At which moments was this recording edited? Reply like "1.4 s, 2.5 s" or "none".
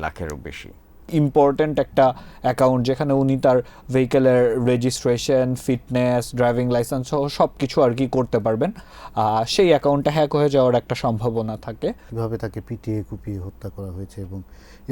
1.1 s, 12.1 s